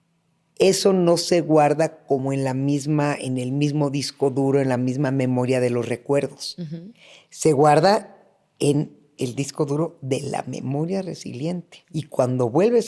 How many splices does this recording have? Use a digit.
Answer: 1